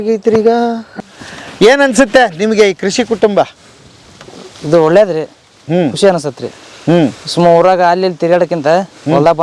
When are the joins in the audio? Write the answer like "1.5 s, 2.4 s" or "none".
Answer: 1.0 s